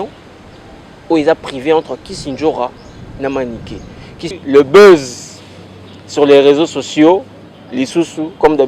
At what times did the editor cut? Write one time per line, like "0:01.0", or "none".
0:04.3

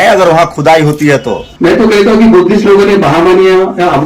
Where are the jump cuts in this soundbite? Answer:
0:01.4

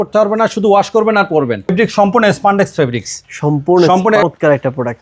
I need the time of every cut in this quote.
0:01.7
0:04.2

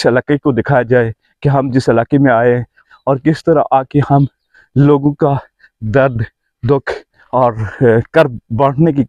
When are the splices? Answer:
none

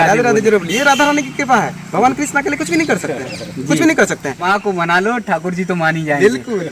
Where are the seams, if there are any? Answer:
0:04.6

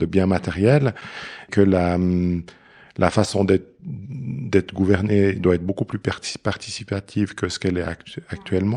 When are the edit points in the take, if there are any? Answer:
0:01.5

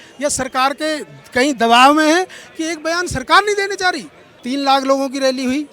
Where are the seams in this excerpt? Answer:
0:04.3

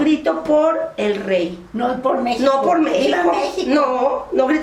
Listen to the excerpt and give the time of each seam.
none

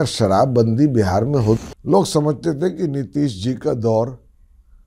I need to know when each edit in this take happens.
0:01.6

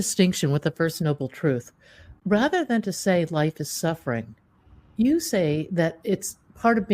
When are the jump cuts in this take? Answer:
0:02.2

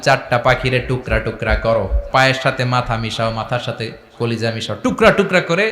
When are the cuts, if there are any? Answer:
0:02.0

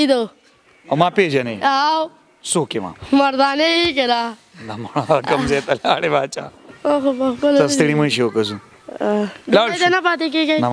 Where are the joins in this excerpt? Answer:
none

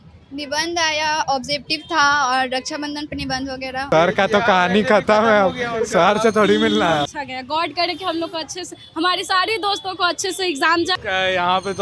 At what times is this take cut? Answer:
0:03.8
0:07.1
0:11.0

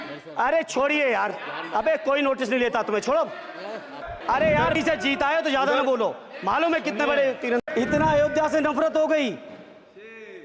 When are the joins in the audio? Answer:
0:04.1
0:07.6

